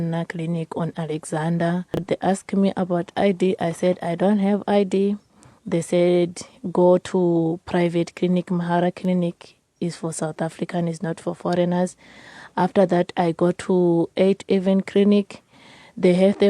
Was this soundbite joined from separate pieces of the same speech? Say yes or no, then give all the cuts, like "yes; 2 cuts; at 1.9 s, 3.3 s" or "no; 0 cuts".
yes; 1 cut; at 2.0 s